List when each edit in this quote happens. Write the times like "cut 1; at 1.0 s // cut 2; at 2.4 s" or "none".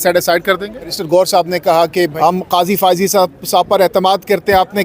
cut 1; at 1.0 s // cut 2; at 2.1 s